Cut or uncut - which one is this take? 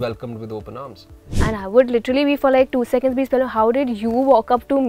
cut